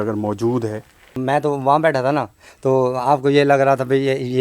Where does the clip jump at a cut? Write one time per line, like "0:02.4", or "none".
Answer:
0:01.1